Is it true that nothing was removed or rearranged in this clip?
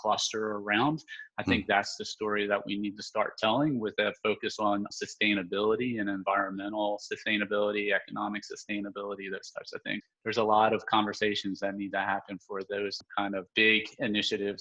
no; 3 cuts; at 4.9 s, 10.0 s, 13.1 s

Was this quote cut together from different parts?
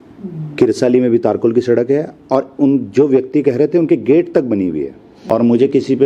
yes; 1 cut; at 5.1 s

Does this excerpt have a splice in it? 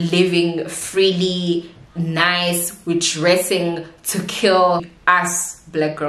yes; 1 cut; at 4.9 s

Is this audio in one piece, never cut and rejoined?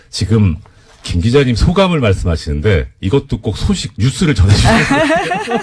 no; 1 cut; at 2.9 s

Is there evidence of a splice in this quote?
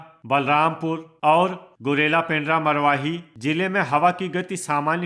yes; 3 cuts; at 1.1 s, 1.7 s, 3.3 s

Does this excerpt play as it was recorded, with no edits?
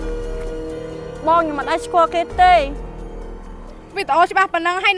no; 1 cut; at 1.2 s

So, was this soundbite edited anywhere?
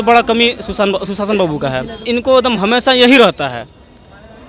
yes; 1 cut; at 2.0 s

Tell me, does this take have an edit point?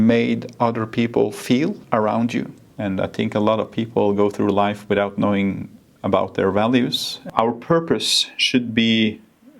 yes; 3 cuts; at 1.8 s, 2.6 s, 7.2 s

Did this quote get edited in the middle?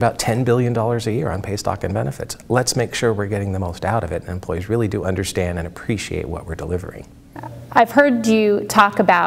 no; 0 cuts

